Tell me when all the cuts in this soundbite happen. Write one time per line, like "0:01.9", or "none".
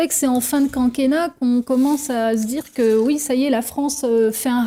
none